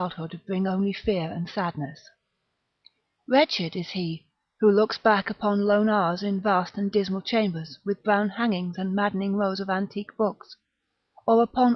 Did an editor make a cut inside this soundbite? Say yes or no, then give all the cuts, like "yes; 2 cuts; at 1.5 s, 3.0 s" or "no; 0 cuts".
yes; 1 cut; at 10.1 s